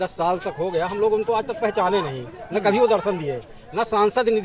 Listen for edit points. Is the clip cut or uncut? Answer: uncut